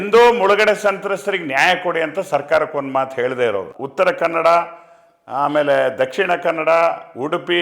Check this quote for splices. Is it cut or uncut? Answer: cut